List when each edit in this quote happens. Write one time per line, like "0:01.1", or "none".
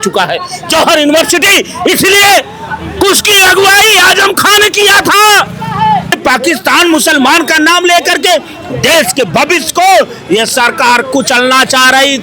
0:06.2